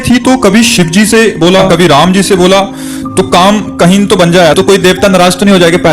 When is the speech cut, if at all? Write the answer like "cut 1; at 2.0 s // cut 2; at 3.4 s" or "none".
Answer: cut 1; at 1.7 s // cut 2; at 4.5 s